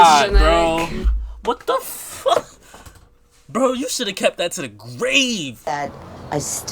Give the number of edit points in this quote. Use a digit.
1